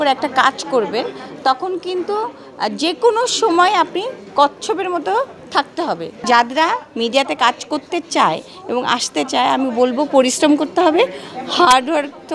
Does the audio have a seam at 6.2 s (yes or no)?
yes